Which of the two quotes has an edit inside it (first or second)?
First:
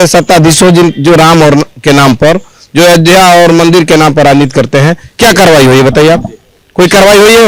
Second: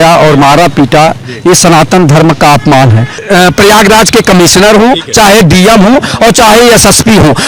second